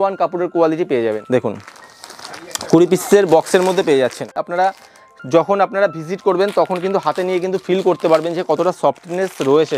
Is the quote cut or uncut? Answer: cut